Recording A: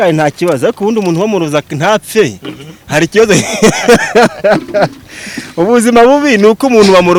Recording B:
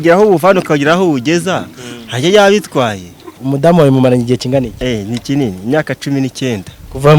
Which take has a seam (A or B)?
B